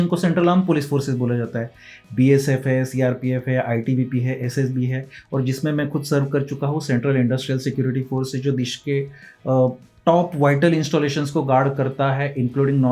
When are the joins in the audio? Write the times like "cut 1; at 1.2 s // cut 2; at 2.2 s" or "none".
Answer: none